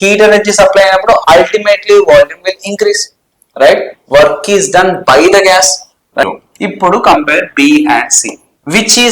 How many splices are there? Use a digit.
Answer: 1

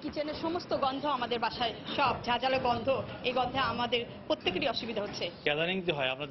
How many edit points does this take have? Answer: 1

